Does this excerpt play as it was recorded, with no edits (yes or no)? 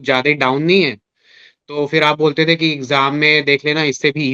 yes